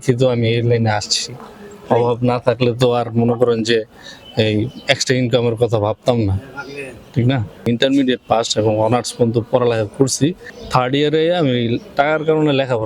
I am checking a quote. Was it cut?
yes; 2 cuts; at 7.7 s, 10.5 s

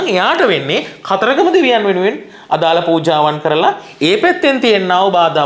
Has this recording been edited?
no; 0 cuts

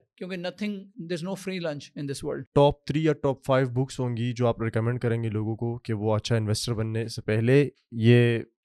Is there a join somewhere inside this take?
yes; 2 cuts; at 0.9 s, 2.3 s

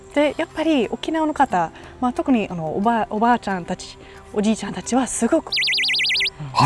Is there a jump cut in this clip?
no; 0 cuts

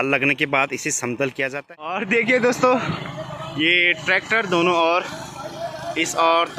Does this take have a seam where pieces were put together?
yes; 1 cut; at 1.9 s

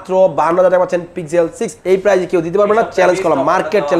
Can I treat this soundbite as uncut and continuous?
no; 1 cut; at 1.7 s

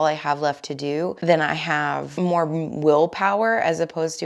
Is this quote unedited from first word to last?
no; 2 cuts; at 1.2 s, 2.1 s

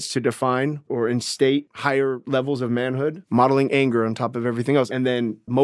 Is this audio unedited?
no; 4 cuts; at 0.9 s, 1.7 s, 3.2 s, 4.9 s

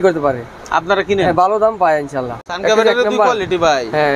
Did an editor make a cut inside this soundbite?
yes; 1 cut; at 2.4 s

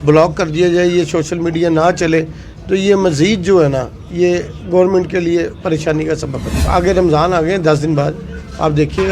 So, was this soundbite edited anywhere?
yes; 1 cut; at 6.7 s

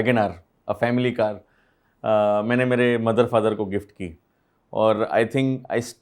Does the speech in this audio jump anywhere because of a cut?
no; 0 cuts

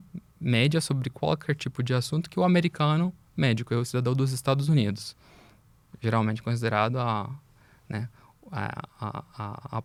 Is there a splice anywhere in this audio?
no; 0 cuts

